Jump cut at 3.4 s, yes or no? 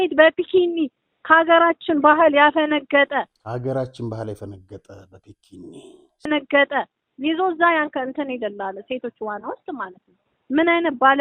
no